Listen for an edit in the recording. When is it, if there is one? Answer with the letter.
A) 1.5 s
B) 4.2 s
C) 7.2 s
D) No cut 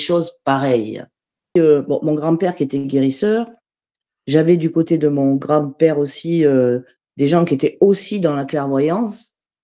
A